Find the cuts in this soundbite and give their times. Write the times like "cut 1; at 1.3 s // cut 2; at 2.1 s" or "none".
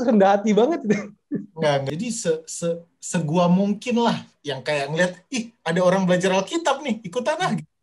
cut 1; at 1.8 s